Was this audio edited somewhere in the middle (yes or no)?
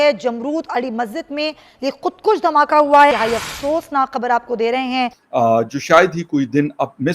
yes